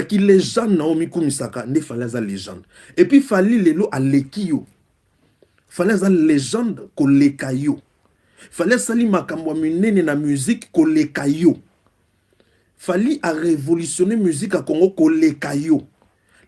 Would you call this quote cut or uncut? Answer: uncut